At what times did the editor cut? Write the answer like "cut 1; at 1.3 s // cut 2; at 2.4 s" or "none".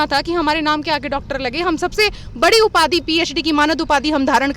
none